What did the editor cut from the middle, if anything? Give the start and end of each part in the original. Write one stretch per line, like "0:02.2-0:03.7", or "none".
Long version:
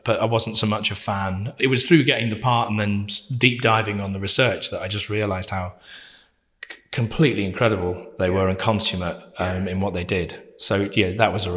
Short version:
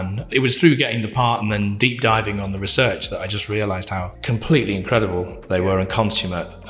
0:03.0-0:03.4
0:05.8-0:06.8